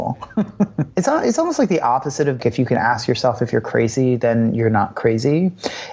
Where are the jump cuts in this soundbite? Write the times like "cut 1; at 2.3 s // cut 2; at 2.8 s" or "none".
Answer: cut 1; at 0.8 s // cut 2; at 2.4 s